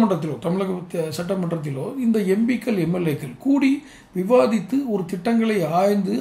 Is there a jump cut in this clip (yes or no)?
no